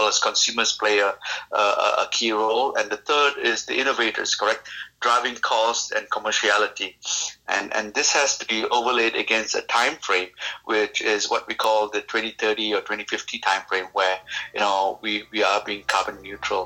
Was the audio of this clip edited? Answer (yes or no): no